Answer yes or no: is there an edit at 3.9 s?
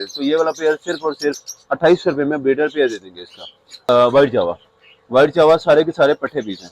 yes